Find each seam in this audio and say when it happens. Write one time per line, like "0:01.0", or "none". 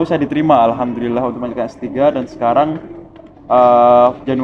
none